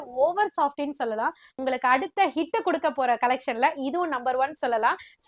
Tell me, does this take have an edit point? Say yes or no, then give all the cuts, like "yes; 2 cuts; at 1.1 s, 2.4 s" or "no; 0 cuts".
yes; 1 cut; at 1.5 s